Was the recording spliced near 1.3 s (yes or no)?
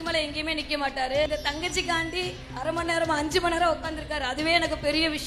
yes